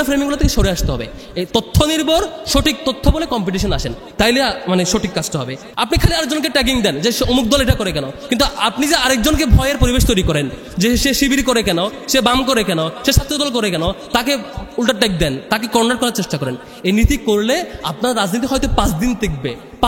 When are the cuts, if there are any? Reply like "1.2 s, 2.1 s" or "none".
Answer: 5.6 s